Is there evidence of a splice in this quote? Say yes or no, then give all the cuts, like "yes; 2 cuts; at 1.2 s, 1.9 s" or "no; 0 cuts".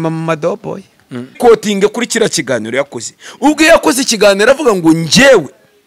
yes; 1 cut; at 1.4 s